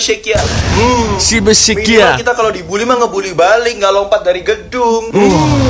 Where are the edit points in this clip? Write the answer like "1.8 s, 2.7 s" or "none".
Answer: none